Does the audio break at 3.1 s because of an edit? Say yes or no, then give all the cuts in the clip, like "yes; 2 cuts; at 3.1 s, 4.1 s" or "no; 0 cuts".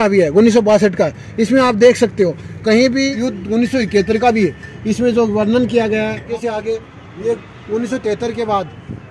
yes; 2 cuts; at 3.1 s, 6.3 s